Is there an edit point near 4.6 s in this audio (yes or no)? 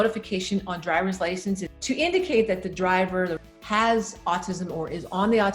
no